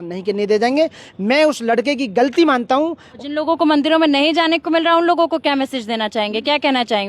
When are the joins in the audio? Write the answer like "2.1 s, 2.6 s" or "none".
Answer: 3.1 s